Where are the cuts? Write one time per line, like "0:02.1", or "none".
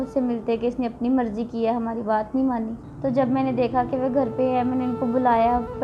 0:02.8